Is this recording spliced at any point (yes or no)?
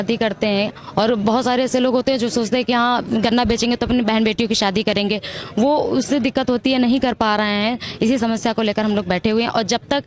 no